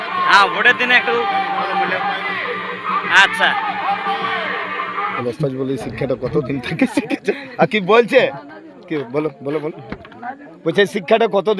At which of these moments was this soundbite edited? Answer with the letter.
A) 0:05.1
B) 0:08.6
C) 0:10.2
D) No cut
A